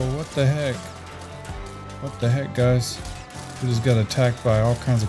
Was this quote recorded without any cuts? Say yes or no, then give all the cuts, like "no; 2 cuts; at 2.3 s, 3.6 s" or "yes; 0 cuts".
yes; 0 cuts